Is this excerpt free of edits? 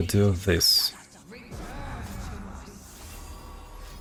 yes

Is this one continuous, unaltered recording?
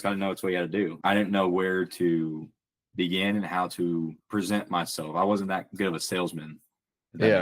no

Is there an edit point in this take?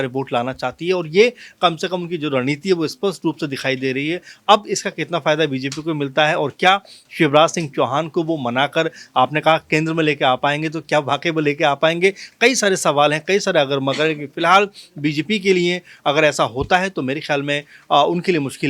no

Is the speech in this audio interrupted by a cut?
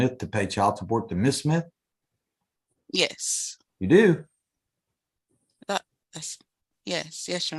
no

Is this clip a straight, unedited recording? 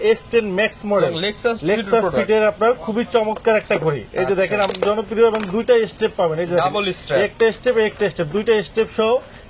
no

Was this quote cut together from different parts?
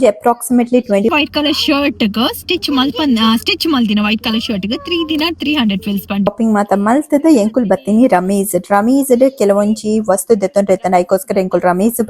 yes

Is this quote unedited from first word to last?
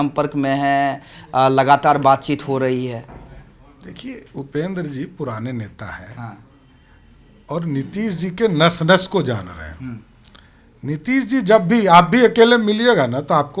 yes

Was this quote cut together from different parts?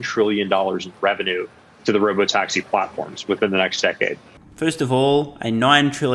no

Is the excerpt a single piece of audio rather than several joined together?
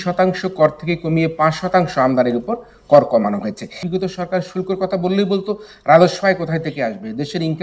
no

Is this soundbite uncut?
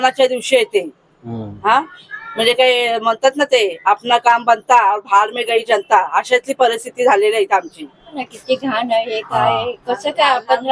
no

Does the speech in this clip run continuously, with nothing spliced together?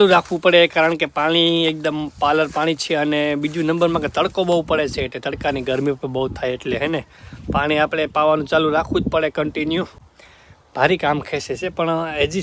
yes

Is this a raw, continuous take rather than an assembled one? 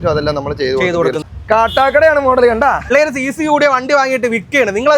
no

